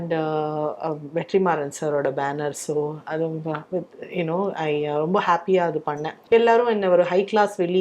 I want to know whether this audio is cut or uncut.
cut